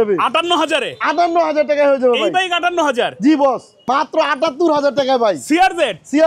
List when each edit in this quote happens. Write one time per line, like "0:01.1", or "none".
0:03.8